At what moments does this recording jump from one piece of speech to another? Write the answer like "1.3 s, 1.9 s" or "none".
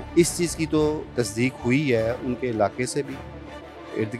1.0 s